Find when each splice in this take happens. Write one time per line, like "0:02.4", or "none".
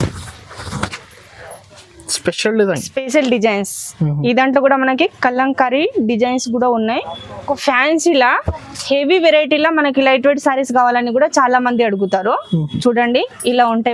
0:07.5